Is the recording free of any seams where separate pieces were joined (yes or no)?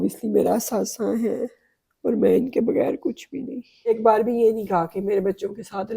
no